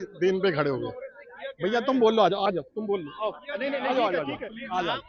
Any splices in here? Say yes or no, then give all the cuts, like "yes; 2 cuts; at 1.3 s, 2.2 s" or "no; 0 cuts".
no; 0 cuts